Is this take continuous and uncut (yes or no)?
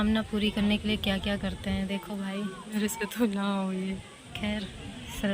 no